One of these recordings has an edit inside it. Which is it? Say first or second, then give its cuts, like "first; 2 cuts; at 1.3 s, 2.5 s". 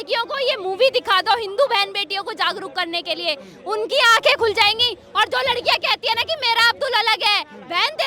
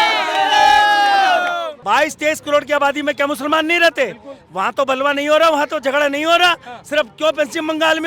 second; 1 cut; at 1.7 s